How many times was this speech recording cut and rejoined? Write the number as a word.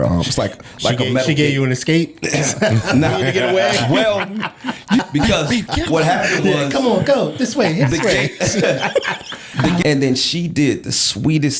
two